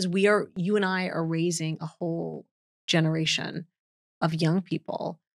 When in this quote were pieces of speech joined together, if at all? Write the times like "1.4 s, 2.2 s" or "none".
none

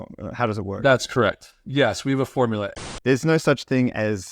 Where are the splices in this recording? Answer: 2.8 s

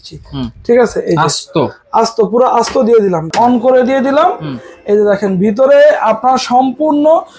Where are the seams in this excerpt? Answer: 3.3 s

